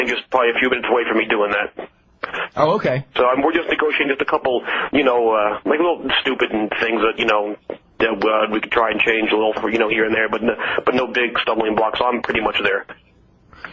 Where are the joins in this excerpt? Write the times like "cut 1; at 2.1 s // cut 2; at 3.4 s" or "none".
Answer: none